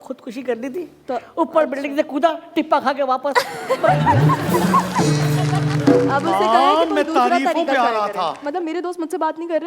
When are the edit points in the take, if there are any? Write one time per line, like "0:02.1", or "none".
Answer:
0:08.4